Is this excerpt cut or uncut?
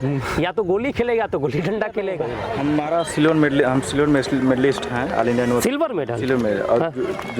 cut